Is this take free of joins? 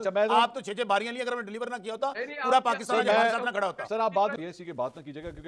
no; 1 cut; at 4.4 s

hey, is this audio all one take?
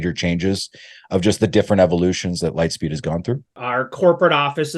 no; 1 cut; at 3.5 s

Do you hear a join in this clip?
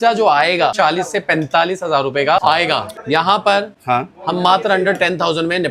yes; 2 cuts; at 0.7 s, 2.5 s

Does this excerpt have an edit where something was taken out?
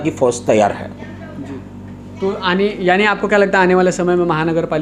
no; 0 cuts

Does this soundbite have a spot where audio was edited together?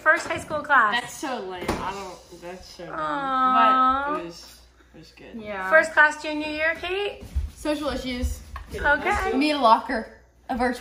no; 0 cuts

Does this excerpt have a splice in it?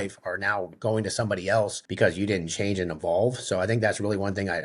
yes; 1 cut; at 1.8 s

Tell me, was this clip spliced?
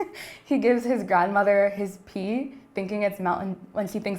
no; 0 cuts

